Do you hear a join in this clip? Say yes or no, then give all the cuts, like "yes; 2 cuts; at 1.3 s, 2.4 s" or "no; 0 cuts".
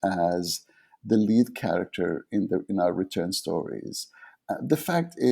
no; 0 cuts